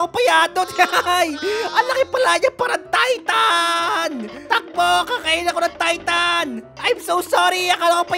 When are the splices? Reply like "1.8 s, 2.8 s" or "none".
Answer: none